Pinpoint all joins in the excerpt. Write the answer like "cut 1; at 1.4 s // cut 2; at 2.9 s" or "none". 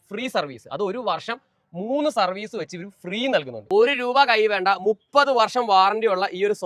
cut 1; at 3.6 s